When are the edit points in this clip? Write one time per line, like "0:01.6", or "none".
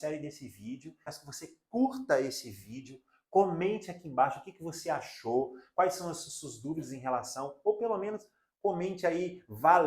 0:01.1